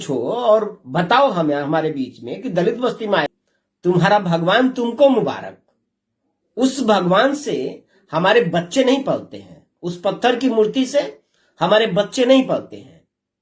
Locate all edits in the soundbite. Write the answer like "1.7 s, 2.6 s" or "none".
3.2 s